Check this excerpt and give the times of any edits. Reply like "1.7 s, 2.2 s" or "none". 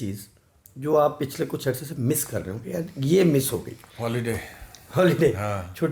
none

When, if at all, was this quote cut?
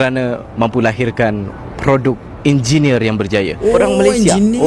3.6 s

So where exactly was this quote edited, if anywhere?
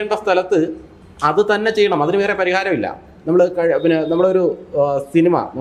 none

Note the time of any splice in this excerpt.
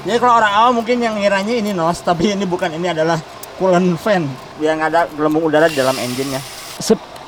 none

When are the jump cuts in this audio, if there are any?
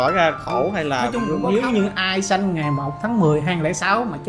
1.2 s

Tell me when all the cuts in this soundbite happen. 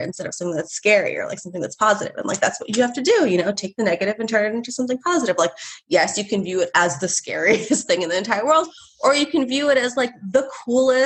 none

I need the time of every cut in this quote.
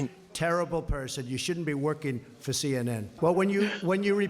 3.1 s

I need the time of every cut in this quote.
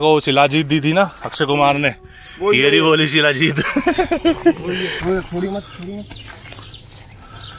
none

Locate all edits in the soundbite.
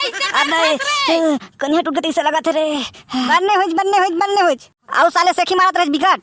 3.3 s

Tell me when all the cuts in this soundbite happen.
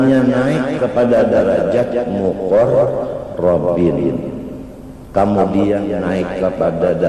none

